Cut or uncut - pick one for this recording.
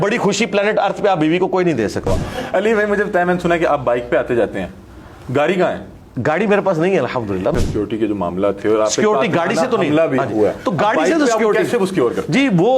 cut